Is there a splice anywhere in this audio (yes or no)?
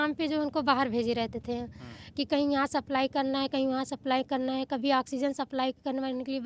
no